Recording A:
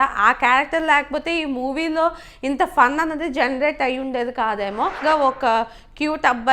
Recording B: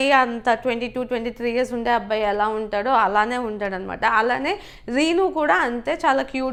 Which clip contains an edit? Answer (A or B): A